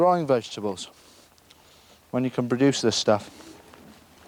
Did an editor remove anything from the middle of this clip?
no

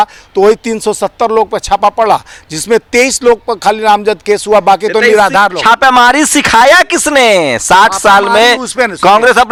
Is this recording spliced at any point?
no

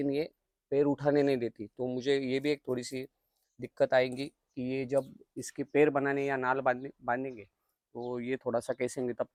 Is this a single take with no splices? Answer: yes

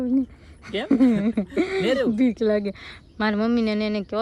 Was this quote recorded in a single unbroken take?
yes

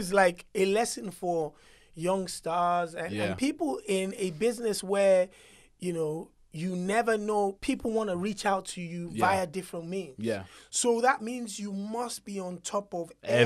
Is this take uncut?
yes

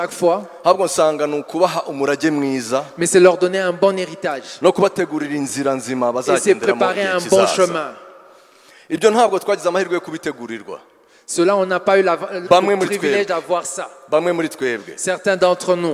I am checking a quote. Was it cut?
no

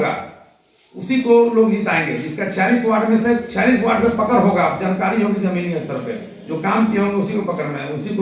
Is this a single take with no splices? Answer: yes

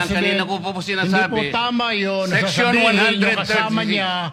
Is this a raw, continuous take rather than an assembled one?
yes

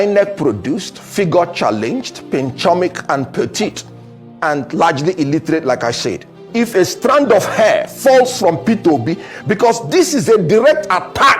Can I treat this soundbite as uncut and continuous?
no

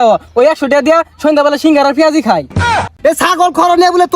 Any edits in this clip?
yes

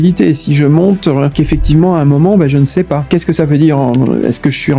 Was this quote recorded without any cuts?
no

